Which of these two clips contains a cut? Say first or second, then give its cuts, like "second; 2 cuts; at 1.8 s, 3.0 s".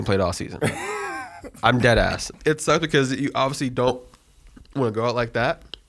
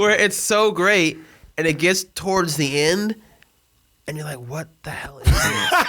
first; 1 cut; at 2.2 s